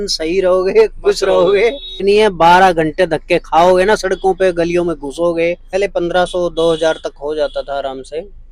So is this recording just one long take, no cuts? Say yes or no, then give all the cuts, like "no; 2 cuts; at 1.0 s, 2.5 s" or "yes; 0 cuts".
no; 2 cuts; at 2.0 s, 5.6 s